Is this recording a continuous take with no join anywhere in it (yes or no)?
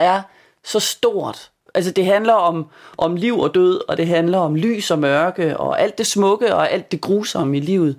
no